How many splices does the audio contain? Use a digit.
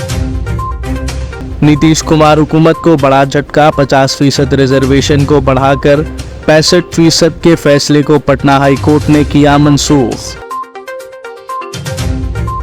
1